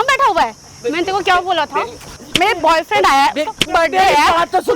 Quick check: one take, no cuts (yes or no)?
no